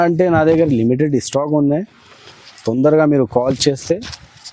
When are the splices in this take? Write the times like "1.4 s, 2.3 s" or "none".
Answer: none